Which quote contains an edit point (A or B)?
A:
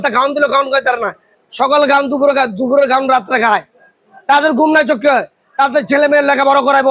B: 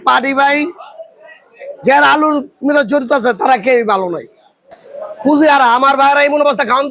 B